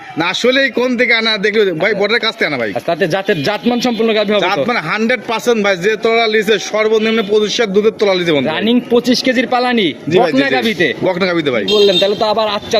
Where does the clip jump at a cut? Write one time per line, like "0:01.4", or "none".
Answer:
none